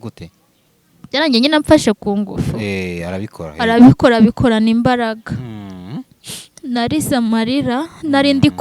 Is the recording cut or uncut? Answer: uncut